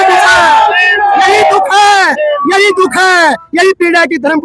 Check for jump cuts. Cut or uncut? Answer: uncut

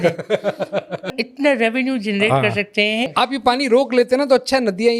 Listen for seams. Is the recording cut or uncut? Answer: cut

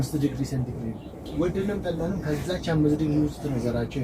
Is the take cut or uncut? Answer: cut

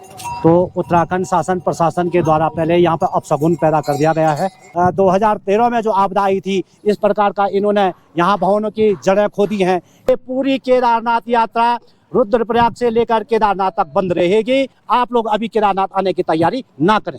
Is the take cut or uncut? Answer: cut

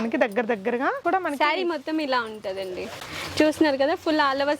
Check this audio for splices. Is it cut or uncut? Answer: cut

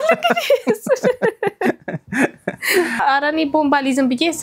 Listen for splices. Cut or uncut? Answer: cut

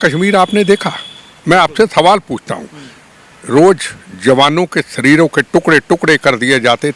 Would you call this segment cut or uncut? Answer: uncut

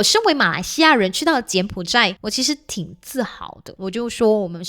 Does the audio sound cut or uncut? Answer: cut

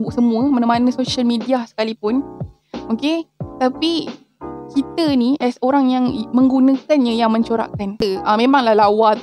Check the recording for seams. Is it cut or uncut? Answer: cut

